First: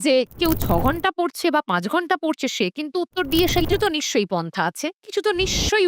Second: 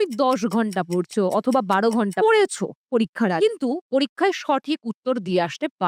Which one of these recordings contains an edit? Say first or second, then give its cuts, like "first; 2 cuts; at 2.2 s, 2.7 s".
first; 1 cut; at 3.7 s